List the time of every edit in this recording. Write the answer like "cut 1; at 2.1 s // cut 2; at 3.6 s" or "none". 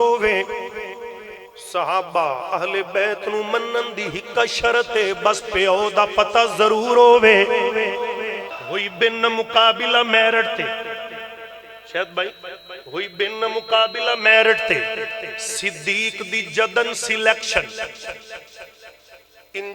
cut 1; at 8.5 s